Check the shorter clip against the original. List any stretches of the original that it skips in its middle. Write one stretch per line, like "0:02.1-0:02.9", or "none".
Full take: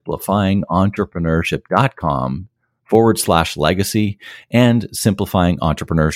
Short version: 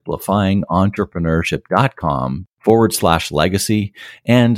0:02.5-0:02.7